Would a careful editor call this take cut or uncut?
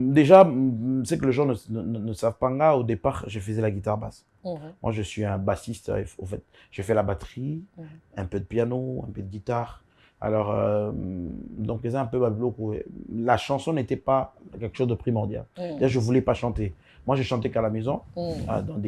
uncut